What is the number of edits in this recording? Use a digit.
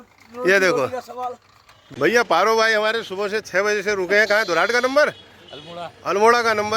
1